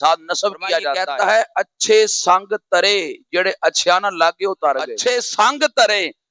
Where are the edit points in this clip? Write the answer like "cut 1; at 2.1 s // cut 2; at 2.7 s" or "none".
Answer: cut 1; at 0.9 s // cut 2; at 4.9 s